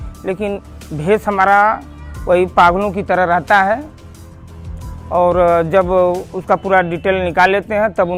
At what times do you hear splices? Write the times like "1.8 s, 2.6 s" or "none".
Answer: none